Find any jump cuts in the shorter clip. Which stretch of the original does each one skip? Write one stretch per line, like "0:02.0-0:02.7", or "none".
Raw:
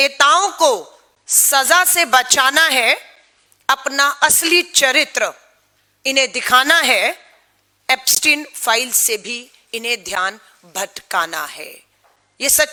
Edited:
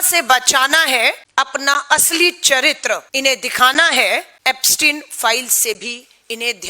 0:03.1-0:03.5
0:05.4-0:06.0
0:07.2-0:07.8

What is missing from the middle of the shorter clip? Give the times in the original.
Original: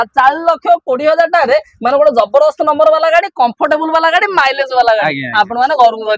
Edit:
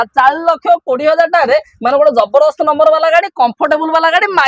none

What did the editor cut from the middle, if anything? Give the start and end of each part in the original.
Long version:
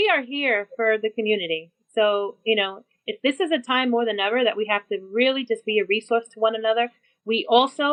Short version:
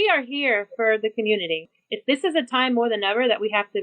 0:01.7-0:02.9

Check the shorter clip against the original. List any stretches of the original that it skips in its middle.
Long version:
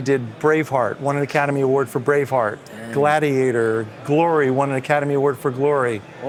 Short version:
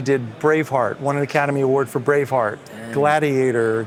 none

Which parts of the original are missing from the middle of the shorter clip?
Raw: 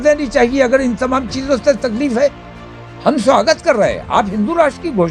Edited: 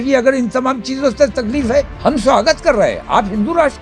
0:02.4-0:02.9

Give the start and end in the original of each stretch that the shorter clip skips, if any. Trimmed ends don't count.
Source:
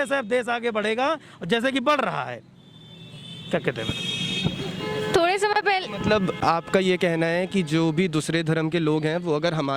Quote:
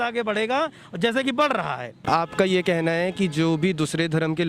0:02.5-0:06.4

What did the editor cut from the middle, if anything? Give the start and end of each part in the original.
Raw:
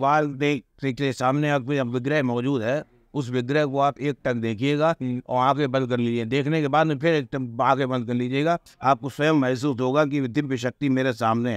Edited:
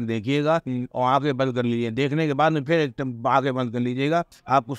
none

